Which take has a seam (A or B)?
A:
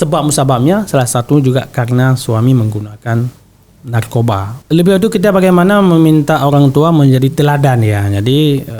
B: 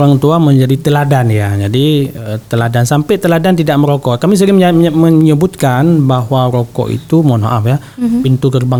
A